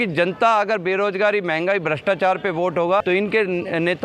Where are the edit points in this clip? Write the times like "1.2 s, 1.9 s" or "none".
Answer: 3.0 s